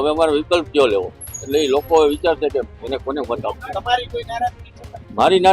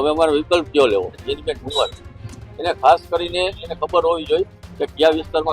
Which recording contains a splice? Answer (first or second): second